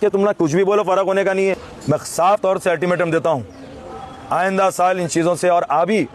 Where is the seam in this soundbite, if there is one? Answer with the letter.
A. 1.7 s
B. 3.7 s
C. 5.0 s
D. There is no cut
A